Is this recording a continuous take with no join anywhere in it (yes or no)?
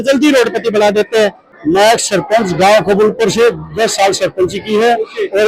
no